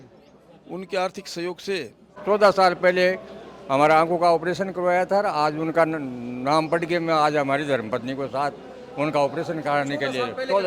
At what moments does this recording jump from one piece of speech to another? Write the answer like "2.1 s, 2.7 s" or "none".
2.2 s